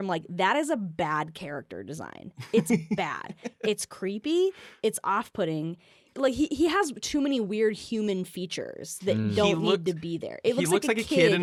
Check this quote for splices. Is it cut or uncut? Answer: uncut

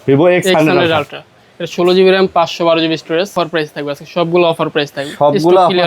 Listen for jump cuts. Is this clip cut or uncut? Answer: cut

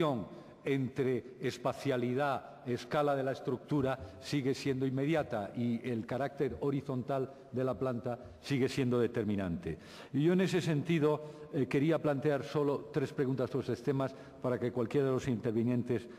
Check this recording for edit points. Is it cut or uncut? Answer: cut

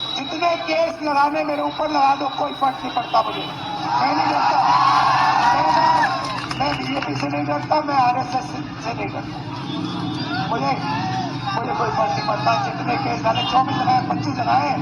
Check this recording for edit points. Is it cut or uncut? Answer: uncut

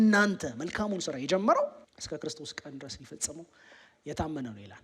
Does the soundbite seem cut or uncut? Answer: cut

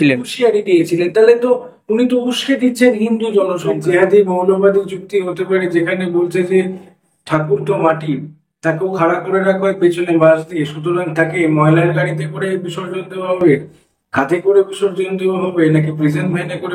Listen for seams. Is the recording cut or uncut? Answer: cut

